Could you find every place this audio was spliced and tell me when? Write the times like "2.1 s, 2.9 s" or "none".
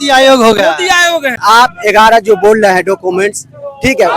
1.4 s